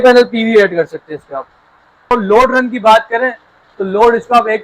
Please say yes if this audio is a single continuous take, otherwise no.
no